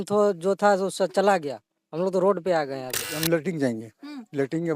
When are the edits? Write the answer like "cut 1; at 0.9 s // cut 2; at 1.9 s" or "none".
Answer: cut 1; at 3.1 s